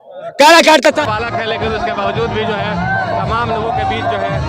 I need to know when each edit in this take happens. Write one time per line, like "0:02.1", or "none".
0:00.9